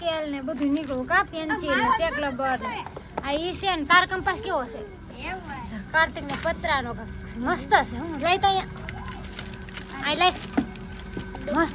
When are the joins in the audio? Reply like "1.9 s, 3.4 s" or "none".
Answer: none